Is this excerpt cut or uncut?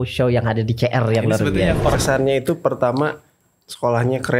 cut